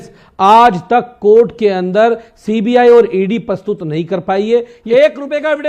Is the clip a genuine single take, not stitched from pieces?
no; 1 cut; at 4.8 s

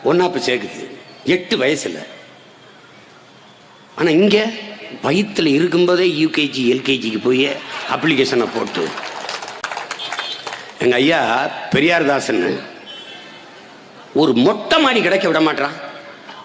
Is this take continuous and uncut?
yes; 0 cuts

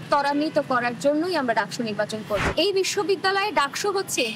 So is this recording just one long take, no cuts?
no; 1 cut; at 2.5 s

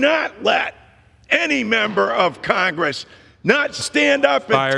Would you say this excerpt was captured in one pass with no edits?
yes; 0 cuts

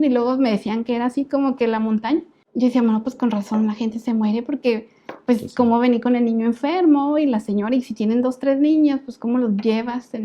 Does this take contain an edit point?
yes; 1 cut; at 2.4 s

